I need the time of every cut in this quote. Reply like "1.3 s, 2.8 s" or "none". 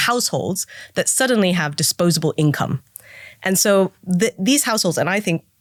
none